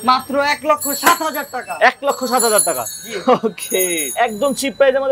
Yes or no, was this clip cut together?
no